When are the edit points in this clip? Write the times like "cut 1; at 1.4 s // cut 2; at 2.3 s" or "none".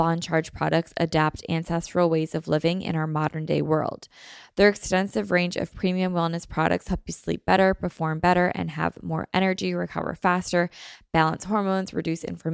none